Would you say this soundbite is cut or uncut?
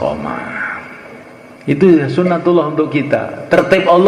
cut